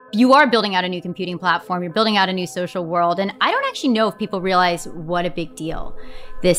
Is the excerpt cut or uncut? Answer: uncut